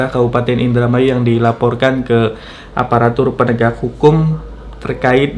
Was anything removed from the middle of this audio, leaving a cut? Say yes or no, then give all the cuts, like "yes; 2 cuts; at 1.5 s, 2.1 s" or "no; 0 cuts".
no; 0 cuts